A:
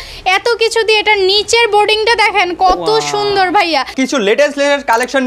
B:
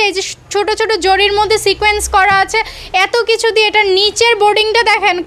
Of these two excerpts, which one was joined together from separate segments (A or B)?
A